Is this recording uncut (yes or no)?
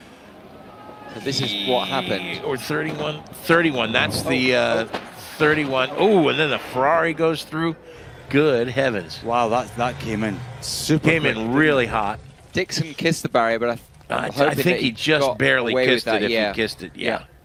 yes